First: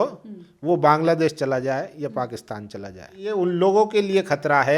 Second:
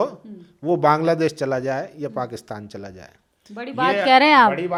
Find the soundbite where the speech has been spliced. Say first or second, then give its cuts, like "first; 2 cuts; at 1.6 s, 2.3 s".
first; 1 cut; at 3.3 s